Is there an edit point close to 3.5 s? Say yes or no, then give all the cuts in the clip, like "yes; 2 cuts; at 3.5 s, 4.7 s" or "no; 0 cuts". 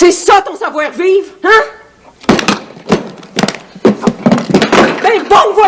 no; 0 cuts